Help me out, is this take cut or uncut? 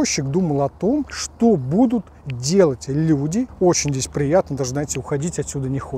cut